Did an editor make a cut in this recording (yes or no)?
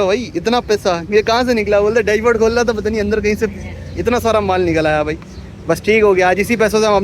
no